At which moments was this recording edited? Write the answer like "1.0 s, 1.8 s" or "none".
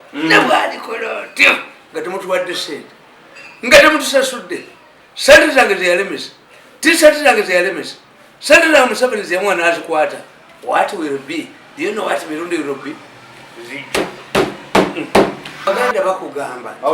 15.7 s